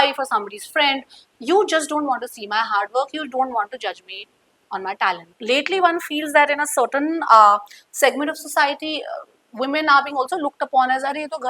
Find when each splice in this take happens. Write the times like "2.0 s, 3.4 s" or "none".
5.3 s